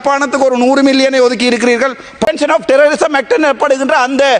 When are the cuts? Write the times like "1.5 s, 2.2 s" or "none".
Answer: 2.3 s